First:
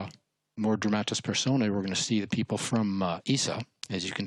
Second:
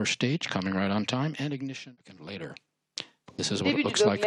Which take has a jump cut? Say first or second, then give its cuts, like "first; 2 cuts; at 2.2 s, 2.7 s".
second; 1 cut; at 1.7 s